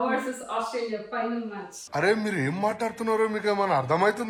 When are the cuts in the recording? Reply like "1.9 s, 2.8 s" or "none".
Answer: none